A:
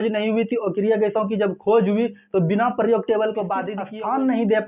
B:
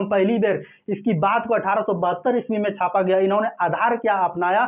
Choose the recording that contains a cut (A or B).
A